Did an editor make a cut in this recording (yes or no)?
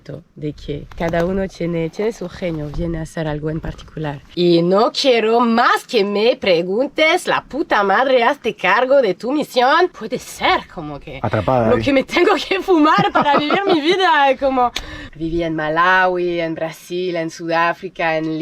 yes